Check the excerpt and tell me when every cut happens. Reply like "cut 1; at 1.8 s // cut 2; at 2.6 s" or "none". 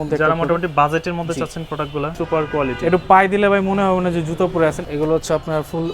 cut 1; at 2.1 s // cut 2; at 4.8 s

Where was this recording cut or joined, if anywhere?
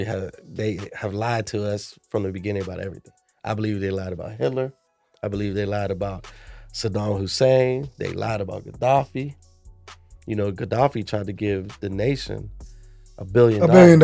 none

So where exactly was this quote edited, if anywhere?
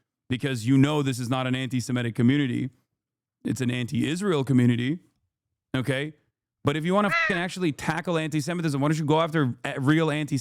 none

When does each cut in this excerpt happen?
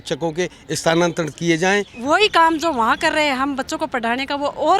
cut 1; at 1.9 s

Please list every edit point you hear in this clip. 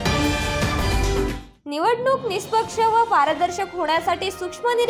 cut 1; at 1.3 s

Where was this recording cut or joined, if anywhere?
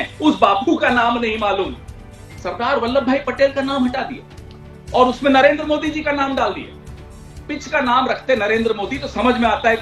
cut 1; at 2.0 s

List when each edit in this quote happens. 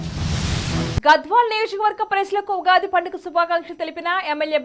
none

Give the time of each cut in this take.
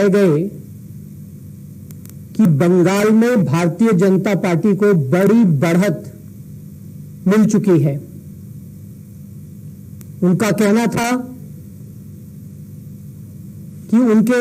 none

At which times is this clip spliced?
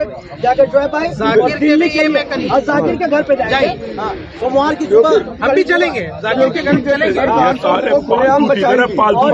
none

